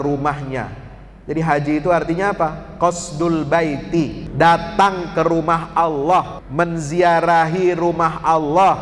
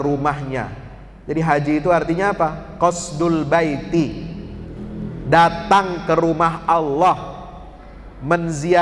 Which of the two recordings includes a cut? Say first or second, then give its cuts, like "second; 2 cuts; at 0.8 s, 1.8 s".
first; 2 cuts; at 4.2 s, 6.4 s